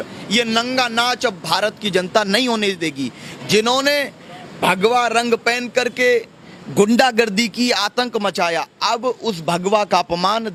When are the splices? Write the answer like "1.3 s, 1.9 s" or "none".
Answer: none